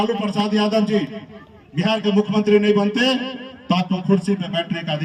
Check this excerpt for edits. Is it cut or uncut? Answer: uncut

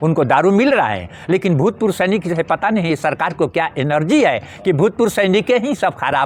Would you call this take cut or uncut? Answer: uncut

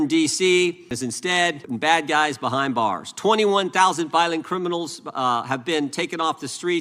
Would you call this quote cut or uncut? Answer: cut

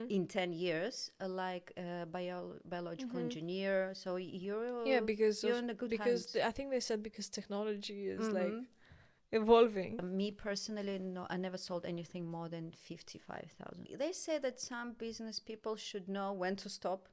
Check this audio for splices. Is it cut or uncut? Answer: cut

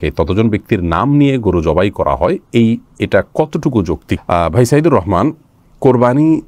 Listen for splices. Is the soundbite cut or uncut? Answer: uncut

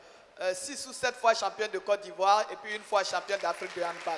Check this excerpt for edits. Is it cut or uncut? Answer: uncut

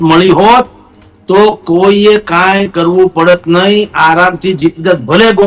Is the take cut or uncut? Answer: uncut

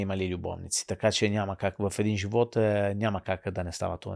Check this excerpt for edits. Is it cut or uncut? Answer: uncut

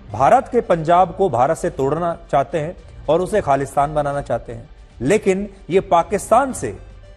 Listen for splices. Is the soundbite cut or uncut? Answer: uncut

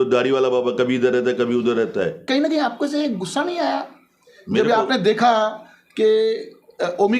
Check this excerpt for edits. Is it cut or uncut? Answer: cut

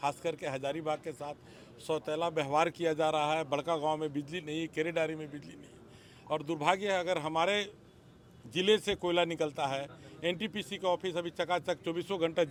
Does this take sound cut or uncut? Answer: uncut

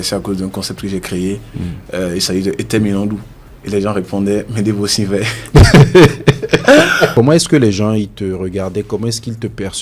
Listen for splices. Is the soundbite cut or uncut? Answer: cut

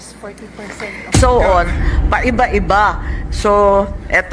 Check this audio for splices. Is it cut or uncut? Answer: cut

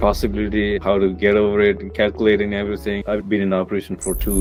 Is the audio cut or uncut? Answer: uncut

